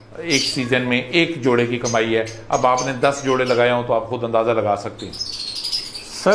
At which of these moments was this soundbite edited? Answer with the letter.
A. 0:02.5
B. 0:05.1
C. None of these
C